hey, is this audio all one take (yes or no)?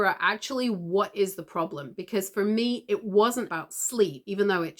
no